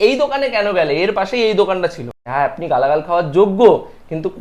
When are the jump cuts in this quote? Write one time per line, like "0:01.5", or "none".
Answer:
0:02.2